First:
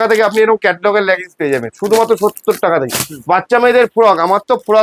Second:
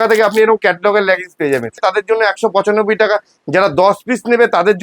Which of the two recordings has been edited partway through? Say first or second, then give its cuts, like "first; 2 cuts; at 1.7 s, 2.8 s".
second; 1 cut; at 1.8 s